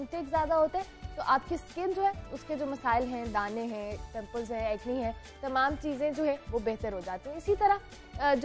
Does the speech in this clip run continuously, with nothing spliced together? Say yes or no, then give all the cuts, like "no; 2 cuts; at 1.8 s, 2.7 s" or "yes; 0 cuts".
yes; 0 cuts